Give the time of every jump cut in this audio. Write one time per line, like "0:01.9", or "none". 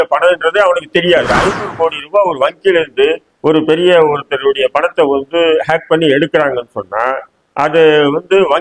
0:01.3